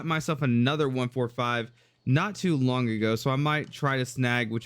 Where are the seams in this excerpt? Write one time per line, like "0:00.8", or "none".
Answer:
none